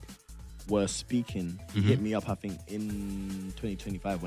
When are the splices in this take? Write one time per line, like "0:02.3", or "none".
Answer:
none